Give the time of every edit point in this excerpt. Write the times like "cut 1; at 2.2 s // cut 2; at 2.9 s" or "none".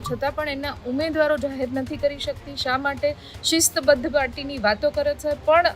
none